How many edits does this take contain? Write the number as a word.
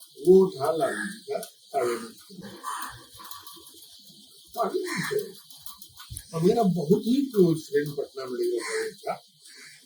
zero